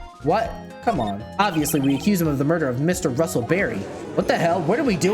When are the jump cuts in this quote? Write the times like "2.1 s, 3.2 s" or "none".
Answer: 1.2 s, 4.0 s